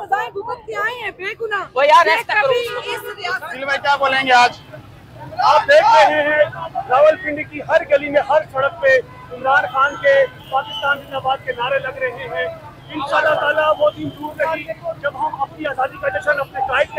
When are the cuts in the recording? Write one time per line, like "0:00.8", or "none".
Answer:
0:03.7